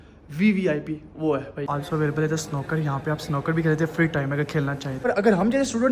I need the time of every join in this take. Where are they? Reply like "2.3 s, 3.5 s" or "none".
1.7 s, 5.1 s